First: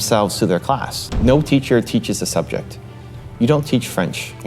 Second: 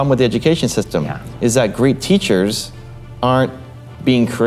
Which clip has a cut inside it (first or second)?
first